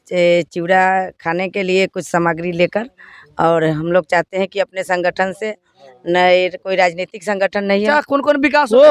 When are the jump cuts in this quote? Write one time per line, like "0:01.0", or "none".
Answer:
0:07.9